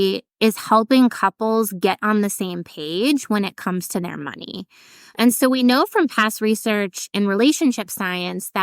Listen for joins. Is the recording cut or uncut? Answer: cut